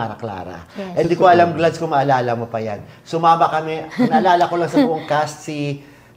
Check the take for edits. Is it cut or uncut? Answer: uncut